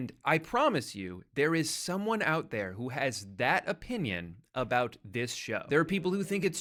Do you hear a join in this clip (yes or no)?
no